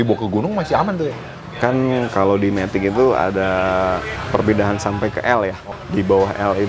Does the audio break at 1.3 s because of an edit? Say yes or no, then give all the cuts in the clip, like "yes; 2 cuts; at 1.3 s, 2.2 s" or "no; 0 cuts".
yes; 3 cuts; at 1.3 s, 4.1 s, 5.7 s